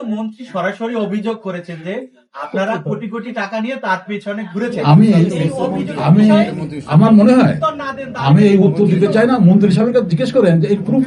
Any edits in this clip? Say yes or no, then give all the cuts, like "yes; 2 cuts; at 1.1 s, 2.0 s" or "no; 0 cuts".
no; 0 cuts